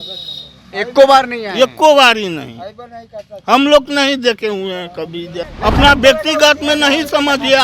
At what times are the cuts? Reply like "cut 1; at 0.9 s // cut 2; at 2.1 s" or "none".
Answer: cut 1; at 5.4 s